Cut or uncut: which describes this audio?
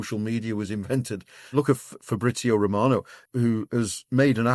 cut